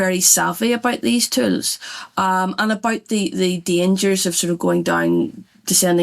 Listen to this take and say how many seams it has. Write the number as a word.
zero